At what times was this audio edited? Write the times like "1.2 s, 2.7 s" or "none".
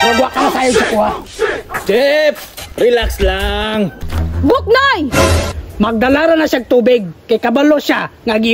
4.0 s, 5.4 s